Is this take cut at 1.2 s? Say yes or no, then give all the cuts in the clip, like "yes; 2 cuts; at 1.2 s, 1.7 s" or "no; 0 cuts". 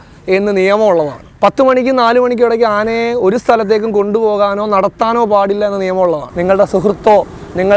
yes; 2 cuts; at 1.2 s, 6.3 s